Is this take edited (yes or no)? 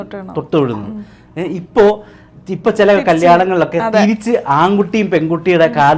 no